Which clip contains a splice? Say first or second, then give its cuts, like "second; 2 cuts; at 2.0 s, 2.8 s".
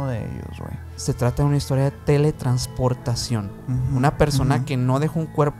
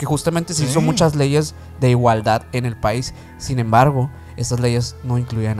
first; 1 cut; at 0.9 s